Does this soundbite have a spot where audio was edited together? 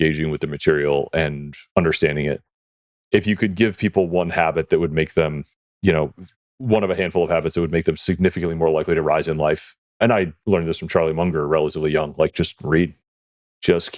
yes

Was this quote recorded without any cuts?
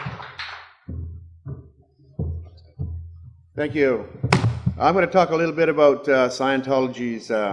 yes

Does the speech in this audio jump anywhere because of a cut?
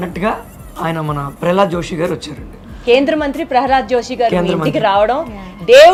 no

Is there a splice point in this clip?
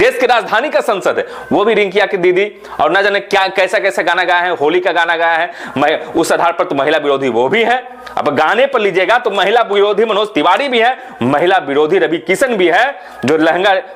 no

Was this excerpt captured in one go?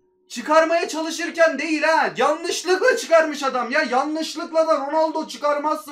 yes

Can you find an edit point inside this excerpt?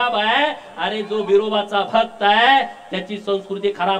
no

